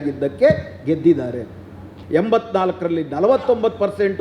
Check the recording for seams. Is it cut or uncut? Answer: cut